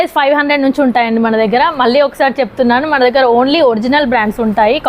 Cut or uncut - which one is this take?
uncut